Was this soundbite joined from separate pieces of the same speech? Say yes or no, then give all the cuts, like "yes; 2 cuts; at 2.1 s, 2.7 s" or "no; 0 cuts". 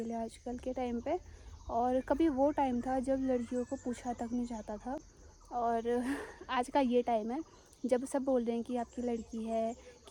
no; 0 cuts